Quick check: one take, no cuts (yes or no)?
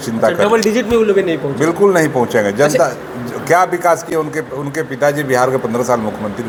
yes